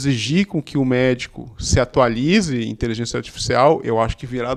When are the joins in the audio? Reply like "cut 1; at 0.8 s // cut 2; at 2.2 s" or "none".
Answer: none